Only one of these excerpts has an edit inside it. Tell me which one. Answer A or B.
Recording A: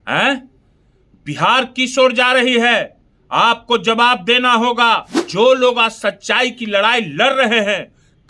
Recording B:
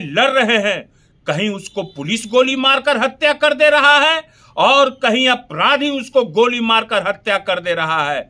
A